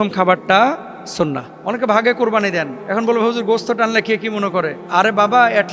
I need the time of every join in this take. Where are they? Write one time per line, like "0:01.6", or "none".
0:01.5
0:02.8
0:04.8